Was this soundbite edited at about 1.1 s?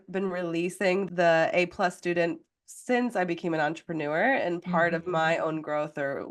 yes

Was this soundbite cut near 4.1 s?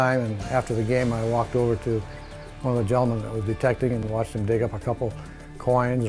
yes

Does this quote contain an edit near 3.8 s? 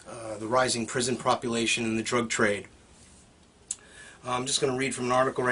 no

